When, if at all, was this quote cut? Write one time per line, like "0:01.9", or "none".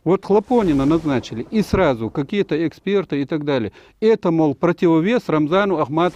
none

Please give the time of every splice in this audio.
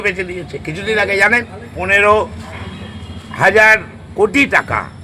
0:01.6

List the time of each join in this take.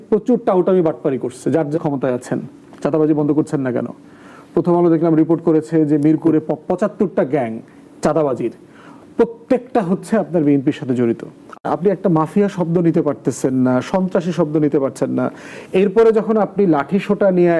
0:01.8
0:11.6

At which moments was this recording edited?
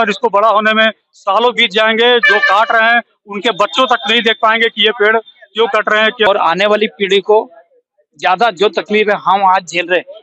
0:06.3

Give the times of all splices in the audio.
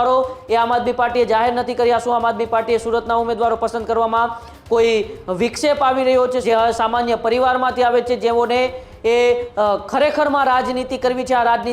0:06.4

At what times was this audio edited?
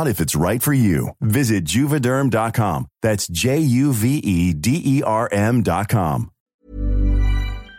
0:06.3

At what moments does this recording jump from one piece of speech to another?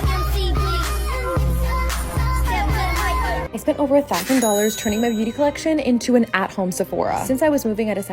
0:03.5

